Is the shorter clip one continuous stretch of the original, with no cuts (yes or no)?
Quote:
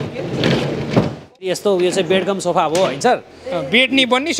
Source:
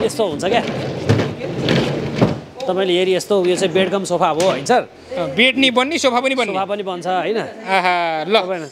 no